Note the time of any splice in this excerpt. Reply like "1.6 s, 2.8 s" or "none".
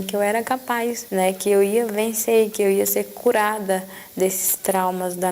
1.0 s